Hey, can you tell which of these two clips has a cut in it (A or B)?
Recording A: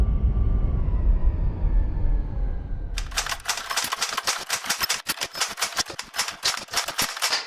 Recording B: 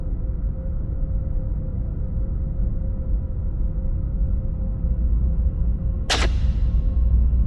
A